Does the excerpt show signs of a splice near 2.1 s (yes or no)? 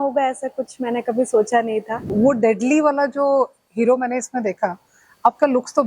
yes